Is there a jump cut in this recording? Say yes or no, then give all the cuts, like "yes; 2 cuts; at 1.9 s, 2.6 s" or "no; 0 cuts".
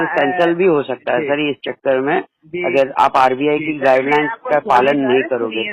no; 0 cuts